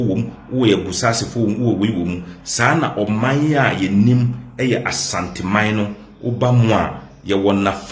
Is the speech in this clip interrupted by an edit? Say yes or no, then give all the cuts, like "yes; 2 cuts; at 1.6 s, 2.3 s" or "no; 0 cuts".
no; 0 cuts